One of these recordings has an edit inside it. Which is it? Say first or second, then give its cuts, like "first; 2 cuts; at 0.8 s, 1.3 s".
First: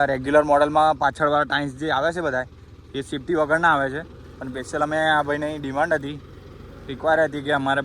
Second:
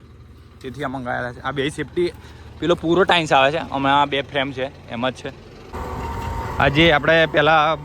second; 1 cut; at 5.7 s